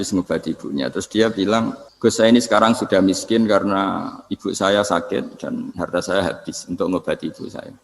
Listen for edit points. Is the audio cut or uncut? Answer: cut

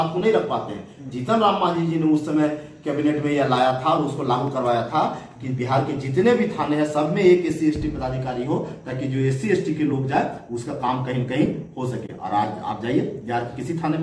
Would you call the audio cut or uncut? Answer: uncut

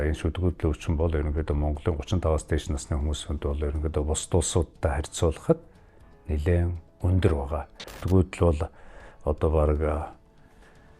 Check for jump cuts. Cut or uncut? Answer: cut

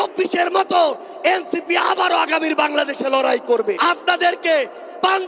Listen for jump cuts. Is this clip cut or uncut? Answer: cut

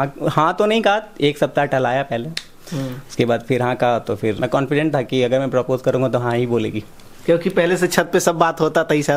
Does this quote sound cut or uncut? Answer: cut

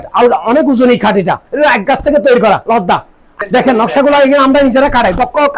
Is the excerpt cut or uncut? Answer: cut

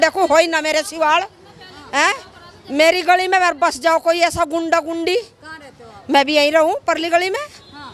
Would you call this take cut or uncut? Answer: uncut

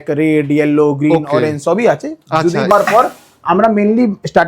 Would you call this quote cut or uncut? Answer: cut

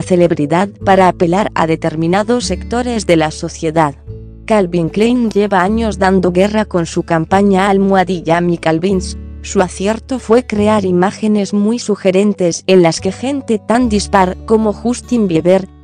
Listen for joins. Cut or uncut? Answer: cut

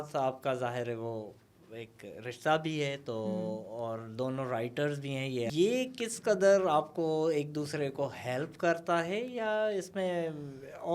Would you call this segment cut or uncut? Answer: cut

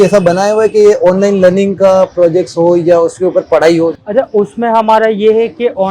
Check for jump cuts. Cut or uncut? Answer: cut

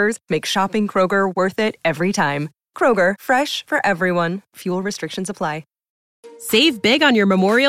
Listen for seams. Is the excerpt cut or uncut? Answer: cut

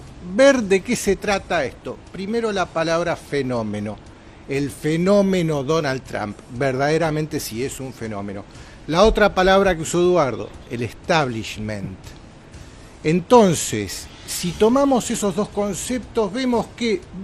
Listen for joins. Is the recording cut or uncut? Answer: uncut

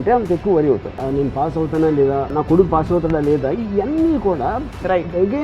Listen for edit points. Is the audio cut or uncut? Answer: cut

